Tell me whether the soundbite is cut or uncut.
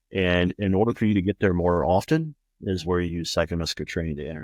uncut